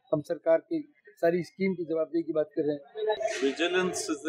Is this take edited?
yes; 1 cut; at 3.2 s

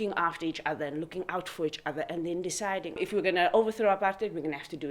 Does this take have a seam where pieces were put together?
yes; 1 cut; at 3.0 s

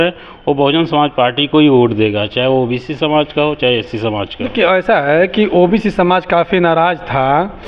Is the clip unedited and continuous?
yes; 0 cuts

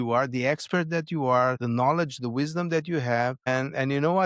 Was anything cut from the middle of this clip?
yes; 2 cuts; at 1.6 s, 3.5 s

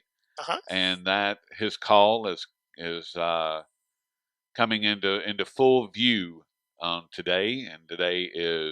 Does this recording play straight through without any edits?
no; 1 cut; at 2.2 s

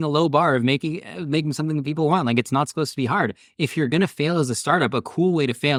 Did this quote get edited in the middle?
no; 0 cuts

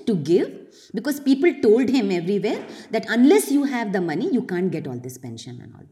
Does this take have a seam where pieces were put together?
no; 0 cuts

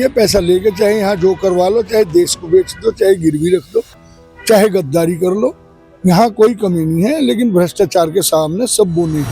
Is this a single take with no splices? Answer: yes; 0 cuts

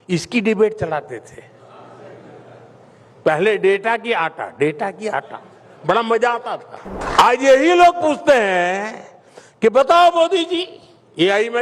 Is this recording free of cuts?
no; 1 cut; at 6.9 s

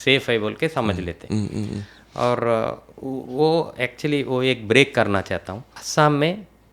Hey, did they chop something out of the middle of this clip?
yes; 1 cut; at 5.8 s

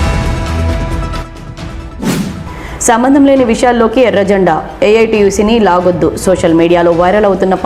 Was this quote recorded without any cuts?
no; 2 cuts; at 1.1 s, 2.1 s

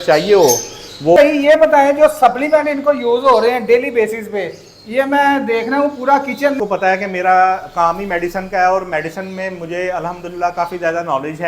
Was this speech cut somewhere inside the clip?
yes; 2 cuts; at 1.2 s, 6.6 s

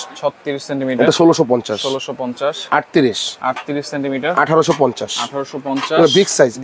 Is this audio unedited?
yes; 0 cuts

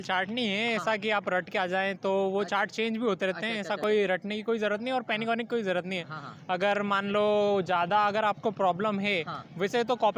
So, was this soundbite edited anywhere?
no; 0 cuts

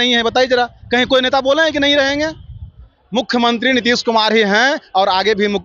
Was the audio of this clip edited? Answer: no; 0 cuts

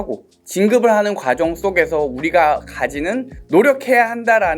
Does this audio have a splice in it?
yes; 1 cut; at 3.3 s

